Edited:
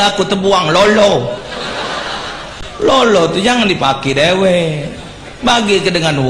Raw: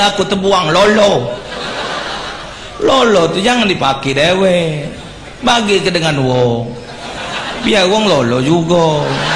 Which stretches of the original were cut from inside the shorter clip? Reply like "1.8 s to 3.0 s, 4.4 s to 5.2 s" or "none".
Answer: none